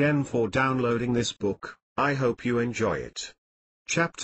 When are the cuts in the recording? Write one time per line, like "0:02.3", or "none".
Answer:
0:01.3